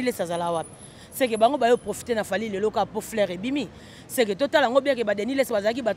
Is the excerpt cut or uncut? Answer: uncut